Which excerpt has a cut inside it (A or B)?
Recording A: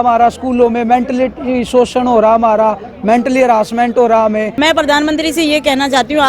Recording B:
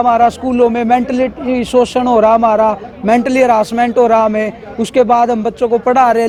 A